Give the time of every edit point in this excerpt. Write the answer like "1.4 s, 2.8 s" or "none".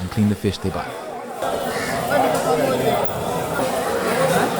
3.6 s